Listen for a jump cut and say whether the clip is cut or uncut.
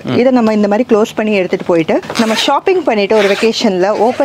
uncut